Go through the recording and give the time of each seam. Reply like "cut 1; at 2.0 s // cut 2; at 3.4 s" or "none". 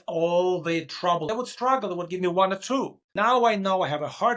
cut 1; at 1.3 s // cut 2; at 3.0 s